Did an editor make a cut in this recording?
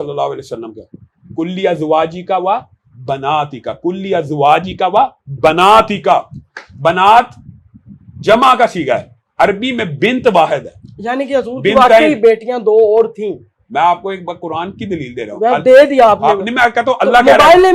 no; 0 cuts

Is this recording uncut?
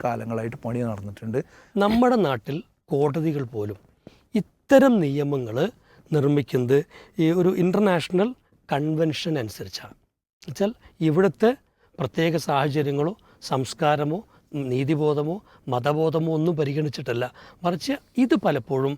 no; 1 cut; at 1.6 s

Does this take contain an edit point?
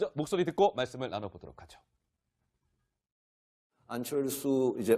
no; 0 cuts

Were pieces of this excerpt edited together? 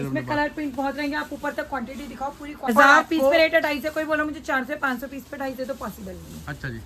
yes; 1 cut; at 2.7 s

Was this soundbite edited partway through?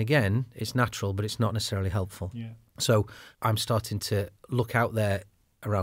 yes; 2 cuts; at 2.2 s, 3.2 s

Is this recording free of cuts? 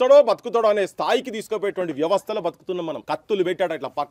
no; 1 cut; at 3.0 s

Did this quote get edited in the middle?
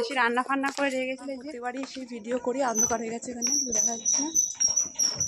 yes; 1 cut; at 1.6 s

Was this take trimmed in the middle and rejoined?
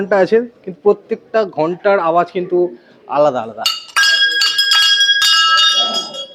no; 0 cuts

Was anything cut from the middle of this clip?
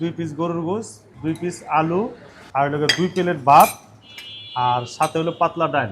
yes; 1 cut; at 1.1 s

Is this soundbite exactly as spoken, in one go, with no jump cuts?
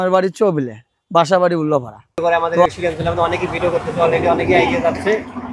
no; 1 cut; at 2.4 s

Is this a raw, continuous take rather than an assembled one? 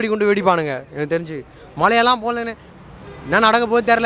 yes; 0 cuts

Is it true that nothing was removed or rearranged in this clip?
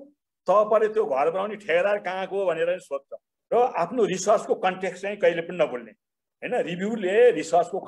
no; 1 cut; at 3.4 s

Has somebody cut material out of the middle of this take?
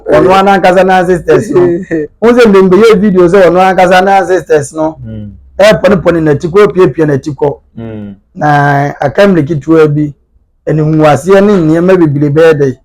no; 0 cuts

